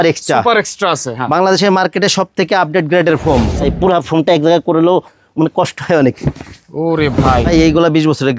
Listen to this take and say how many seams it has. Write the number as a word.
two